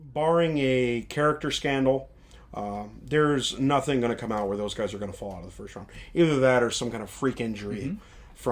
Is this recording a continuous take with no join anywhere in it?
yes; 0 cuts

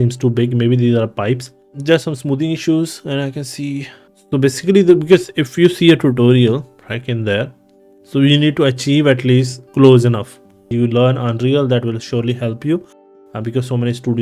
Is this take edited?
yes; 3 cuts; at 3.9 s, 9.6 s, 10.6 s

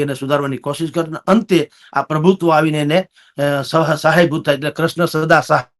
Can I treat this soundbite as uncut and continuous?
yes; 0 cuts

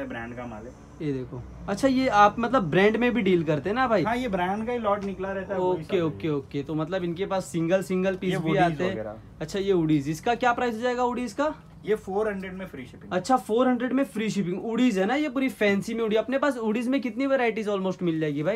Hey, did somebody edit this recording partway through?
no; 0 cuts

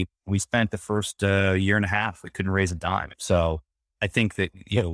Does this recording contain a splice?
yes; 1 cut; at 2.9 s

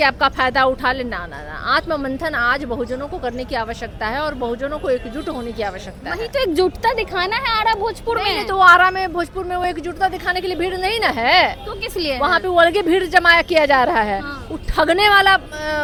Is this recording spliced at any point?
no; 0 cuts

